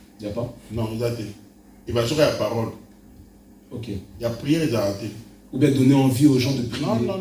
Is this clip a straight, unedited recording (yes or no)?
yes